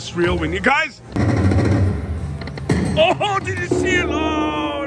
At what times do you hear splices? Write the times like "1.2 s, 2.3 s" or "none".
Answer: 1.2 s